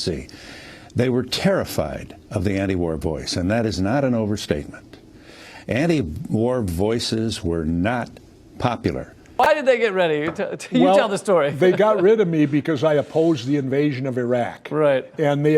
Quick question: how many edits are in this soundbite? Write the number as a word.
one